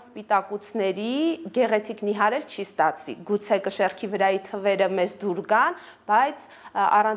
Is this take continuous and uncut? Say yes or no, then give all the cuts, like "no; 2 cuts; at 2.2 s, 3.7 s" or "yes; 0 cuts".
yes; 0 cuts